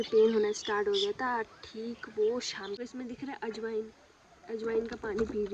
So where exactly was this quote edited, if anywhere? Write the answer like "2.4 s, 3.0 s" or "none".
2.8 s